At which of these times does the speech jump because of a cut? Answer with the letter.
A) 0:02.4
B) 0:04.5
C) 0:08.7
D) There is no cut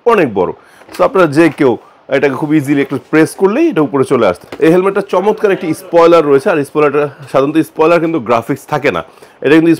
B